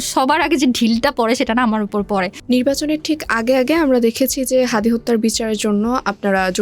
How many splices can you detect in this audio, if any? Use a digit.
1